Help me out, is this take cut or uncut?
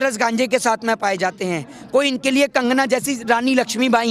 uncut